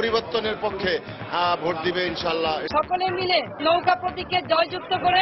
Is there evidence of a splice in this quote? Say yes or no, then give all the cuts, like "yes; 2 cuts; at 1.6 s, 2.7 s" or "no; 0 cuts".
yes; 2 cuts; at 2.6 s, 3.6 s